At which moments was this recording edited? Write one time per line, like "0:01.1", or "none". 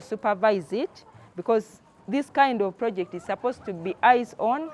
none